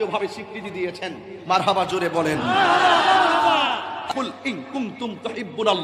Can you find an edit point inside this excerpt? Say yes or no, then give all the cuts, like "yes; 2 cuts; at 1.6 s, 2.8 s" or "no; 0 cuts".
yes; 1 cut; at 4.0 s